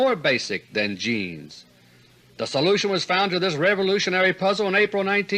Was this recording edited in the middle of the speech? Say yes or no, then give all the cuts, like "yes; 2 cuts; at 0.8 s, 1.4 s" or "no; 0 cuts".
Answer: no; 0 cuts